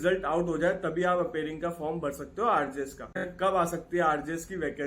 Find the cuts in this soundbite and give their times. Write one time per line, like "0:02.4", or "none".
0:03.3